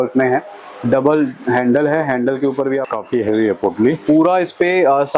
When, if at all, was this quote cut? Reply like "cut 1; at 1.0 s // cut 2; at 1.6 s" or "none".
cut 1; at 2.9 s